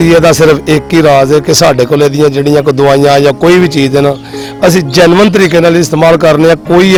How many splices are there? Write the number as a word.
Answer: zero